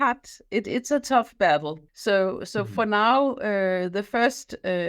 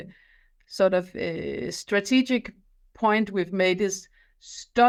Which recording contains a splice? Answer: first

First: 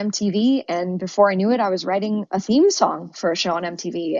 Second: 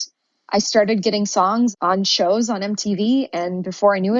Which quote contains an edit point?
second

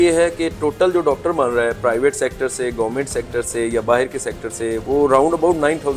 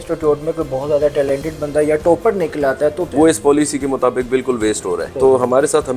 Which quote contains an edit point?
second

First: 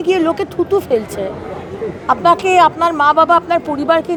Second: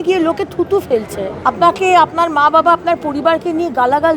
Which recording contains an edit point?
second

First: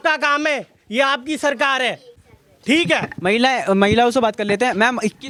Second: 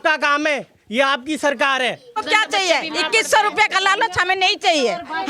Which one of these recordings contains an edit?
second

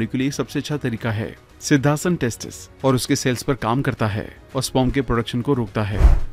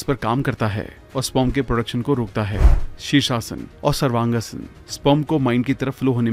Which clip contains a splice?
first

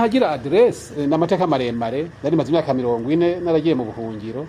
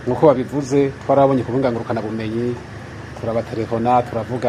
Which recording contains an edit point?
first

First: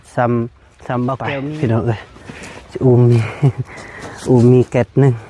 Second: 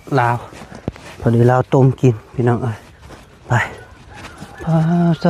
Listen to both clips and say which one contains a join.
first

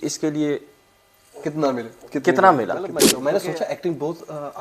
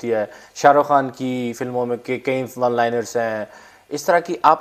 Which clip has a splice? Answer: first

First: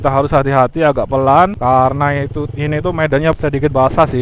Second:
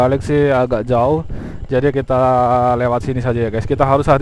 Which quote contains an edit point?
first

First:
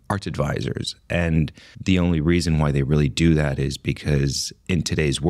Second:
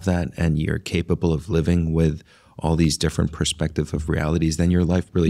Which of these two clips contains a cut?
first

